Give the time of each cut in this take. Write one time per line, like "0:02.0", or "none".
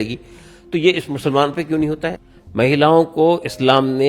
0:02.2